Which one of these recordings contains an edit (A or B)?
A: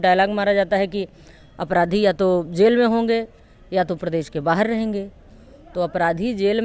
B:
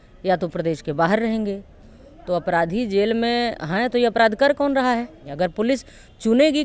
B